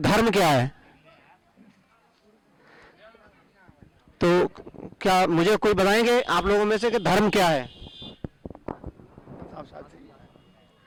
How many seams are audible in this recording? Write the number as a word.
zero